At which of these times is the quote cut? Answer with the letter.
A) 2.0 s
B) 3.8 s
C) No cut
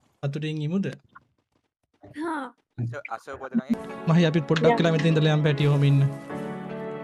B